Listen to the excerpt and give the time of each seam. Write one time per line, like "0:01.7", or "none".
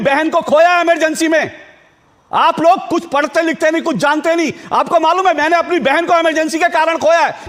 none